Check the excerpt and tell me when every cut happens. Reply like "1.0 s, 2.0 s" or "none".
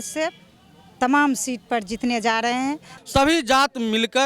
2.9 s